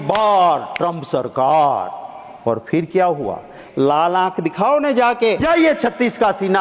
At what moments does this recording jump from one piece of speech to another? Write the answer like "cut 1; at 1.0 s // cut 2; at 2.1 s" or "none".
cut 1; at 3.6 s // cut 2; at 5.4 s